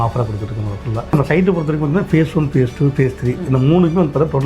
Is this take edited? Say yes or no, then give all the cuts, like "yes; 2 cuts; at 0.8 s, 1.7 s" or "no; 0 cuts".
yes; 1 cut; at 1.1 s